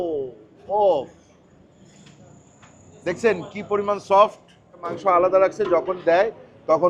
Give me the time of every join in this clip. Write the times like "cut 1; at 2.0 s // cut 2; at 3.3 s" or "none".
cut 1; at 4.9 s